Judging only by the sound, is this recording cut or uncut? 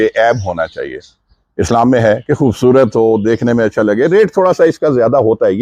uncut